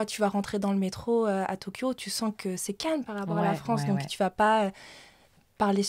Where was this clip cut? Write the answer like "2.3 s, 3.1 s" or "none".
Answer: none

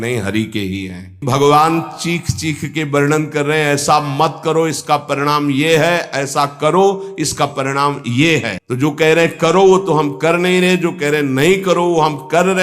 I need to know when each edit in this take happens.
1.2 s, 8.6 s

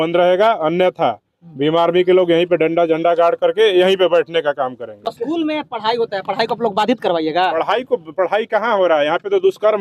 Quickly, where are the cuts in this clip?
4.9 s

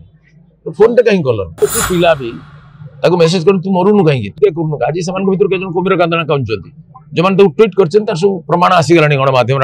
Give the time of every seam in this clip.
1.6 s

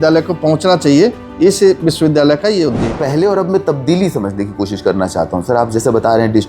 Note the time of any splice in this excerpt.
3.0 s

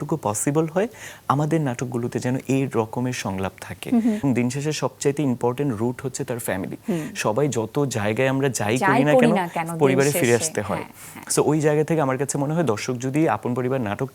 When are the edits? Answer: 4.2 s

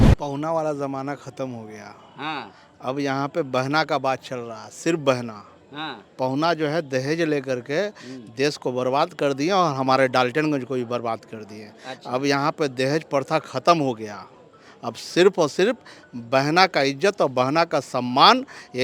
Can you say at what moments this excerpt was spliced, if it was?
none

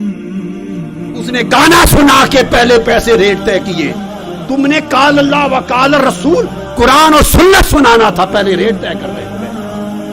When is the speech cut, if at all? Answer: 9.2 s

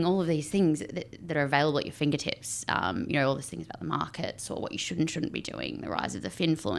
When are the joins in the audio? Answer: none

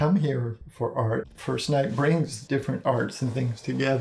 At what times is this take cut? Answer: 1.3 s, 2.4 s

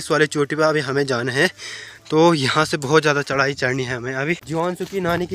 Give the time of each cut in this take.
4.4 s

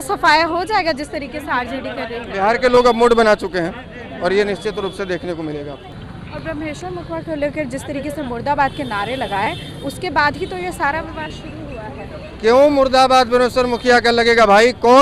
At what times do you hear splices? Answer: none

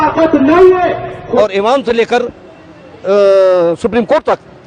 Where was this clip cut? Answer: 1.4 s

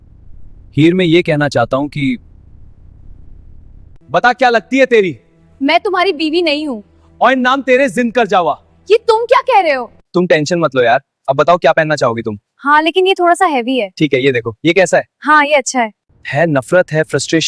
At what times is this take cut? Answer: 4.0 s, 9.9 s, 16.2 s

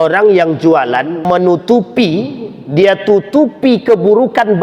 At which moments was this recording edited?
1.2 s

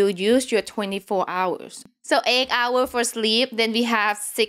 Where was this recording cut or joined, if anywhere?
1.8 s

